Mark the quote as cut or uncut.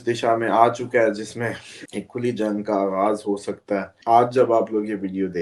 cut